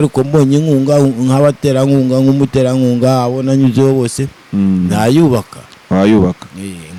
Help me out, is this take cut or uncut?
uncut